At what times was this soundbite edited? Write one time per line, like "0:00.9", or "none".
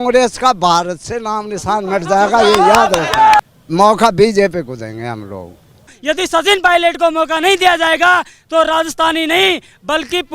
0:03.4
0:05.9